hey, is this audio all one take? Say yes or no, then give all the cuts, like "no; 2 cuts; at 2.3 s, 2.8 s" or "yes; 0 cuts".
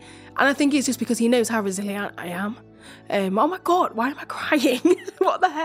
yes; 0 cuts